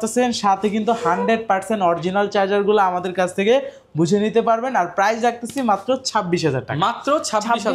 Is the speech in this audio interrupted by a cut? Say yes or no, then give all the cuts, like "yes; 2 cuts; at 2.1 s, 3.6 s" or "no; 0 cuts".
no; 0 cuts